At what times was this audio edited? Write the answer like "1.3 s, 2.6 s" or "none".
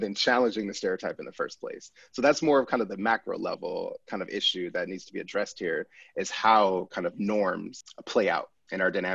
7.8 s